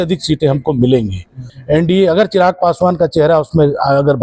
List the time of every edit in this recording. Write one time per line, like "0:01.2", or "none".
0:01.5